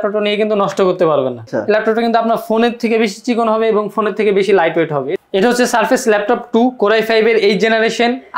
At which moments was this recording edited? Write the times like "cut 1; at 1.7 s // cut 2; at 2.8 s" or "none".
cut 1; at 1.4 s // cut 2; at 5.1 s